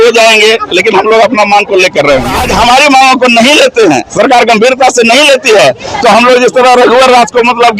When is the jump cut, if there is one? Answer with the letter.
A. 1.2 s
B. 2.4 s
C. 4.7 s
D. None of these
B